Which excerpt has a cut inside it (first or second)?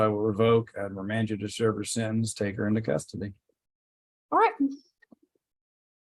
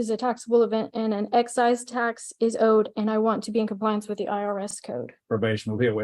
second